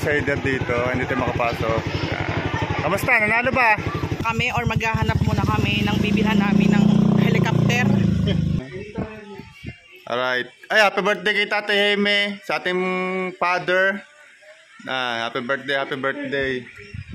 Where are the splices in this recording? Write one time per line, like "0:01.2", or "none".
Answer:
0:04.2
0:08.6